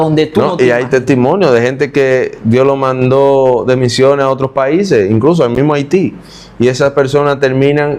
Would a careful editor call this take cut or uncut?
uncut